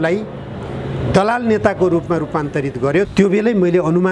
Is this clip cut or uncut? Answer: cut